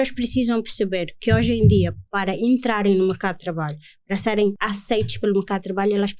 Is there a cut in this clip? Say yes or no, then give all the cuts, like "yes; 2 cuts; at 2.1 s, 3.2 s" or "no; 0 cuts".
yes; 1 cut; at 4.6 s